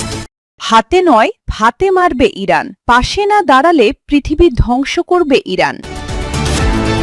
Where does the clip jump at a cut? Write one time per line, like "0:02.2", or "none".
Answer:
0:05.8